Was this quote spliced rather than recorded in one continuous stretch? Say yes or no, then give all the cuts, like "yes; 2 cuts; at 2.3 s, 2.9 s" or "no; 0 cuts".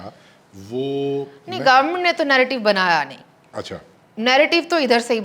no; 0 cuts